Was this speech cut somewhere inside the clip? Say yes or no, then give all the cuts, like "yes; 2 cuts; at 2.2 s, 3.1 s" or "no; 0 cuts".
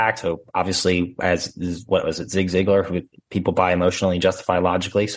yes; 1 cut; at 3.1 s